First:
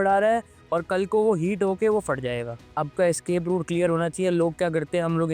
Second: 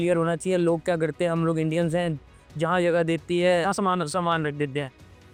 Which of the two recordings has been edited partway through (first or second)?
first